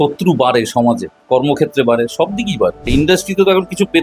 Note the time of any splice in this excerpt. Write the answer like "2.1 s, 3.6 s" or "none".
1.1 s, 2.9 s